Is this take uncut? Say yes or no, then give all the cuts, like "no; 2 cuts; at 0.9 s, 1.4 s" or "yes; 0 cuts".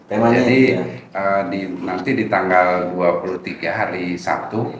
yes; 0 cuts